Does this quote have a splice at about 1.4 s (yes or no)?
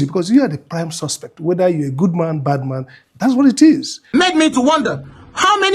no